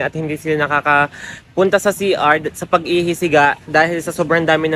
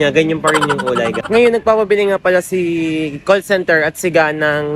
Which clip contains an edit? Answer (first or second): second